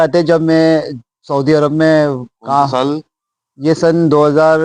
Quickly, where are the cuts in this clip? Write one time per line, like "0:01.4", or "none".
none